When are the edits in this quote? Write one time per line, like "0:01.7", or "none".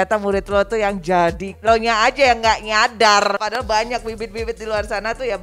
0:01.5
0:03.4